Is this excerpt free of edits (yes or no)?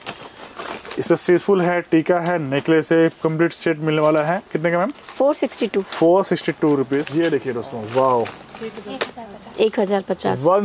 no